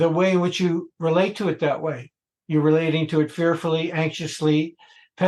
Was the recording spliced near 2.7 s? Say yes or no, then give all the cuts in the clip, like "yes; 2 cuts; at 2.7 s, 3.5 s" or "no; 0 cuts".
no; 0 cuts